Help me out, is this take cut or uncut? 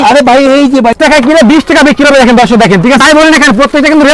cut